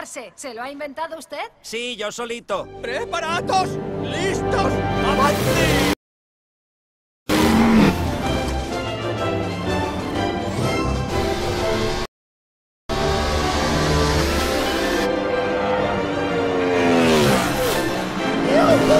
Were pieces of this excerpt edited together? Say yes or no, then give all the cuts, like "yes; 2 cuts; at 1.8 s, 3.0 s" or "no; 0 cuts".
no; 0 cuts